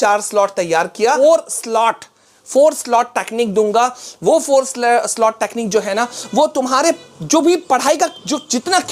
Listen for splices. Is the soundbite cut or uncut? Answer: cut